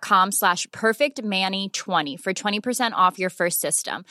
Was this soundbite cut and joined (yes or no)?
no